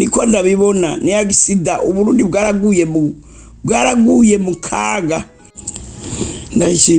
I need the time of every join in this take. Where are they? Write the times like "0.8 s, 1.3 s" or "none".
5.5 s